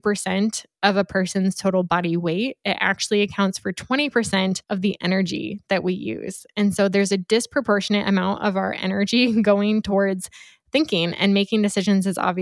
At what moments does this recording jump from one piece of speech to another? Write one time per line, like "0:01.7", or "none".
none

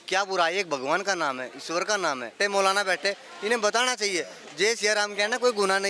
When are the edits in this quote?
0:02.3

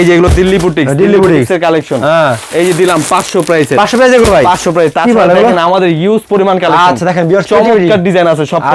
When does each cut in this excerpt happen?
none

